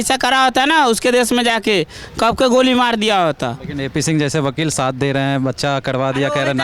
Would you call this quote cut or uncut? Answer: uncut